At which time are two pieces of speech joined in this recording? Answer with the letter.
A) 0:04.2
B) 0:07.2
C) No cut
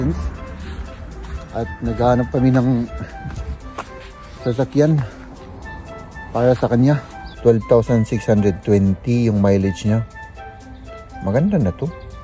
B